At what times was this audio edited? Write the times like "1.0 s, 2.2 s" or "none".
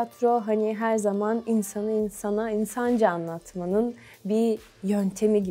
none